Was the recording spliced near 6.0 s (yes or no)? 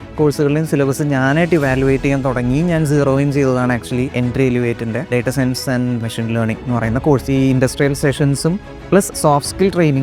yes